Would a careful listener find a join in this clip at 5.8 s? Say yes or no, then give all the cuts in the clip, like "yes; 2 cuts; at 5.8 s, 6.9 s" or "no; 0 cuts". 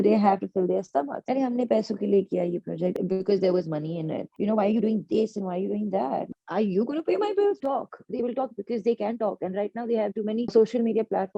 no; 3 cuts; at 1.2 s, 4.3 s, 7.6 s